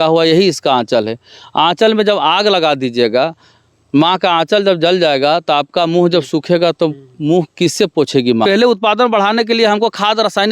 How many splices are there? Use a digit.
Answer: 1